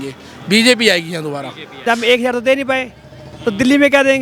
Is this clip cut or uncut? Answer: cut